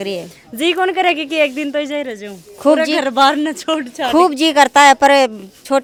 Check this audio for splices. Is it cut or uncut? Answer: uncut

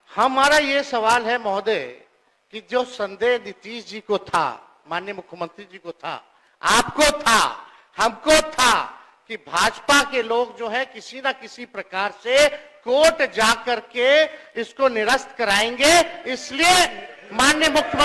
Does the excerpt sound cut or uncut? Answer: uncut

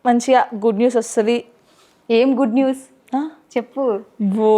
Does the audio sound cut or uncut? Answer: uncut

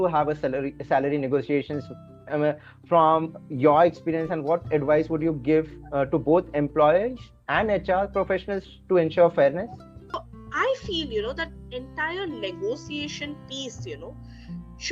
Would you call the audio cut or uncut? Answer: cut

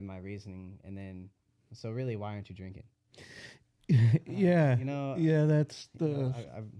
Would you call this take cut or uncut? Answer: uncut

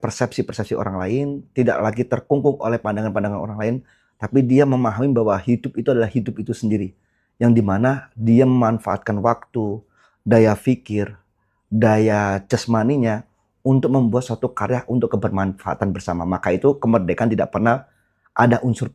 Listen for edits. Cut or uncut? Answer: uncut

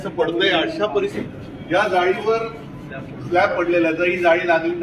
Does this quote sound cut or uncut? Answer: cut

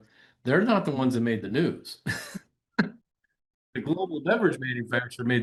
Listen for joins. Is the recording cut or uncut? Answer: uncut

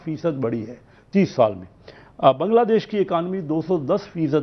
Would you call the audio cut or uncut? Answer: uncut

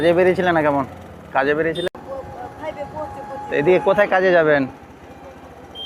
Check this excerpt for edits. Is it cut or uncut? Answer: cut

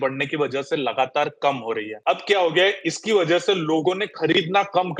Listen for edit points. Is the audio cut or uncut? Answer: cut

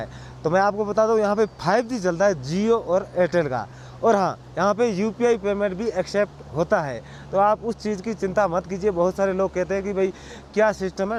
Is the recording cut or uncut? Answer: uncut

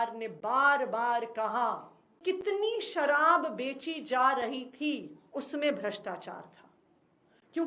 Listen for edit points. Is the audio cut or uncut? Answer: cut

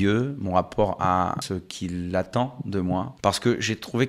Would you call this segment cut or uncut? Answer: cut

